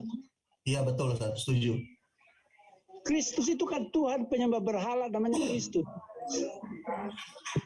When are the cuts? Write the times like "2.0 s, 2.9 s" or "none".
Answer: none